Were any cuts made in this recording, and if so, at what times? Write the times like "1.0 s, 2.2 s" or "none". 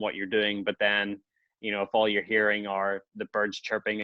none